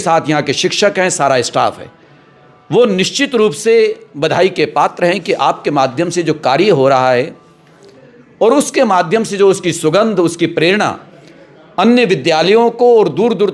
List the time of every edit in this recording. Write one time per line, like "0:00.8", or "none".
none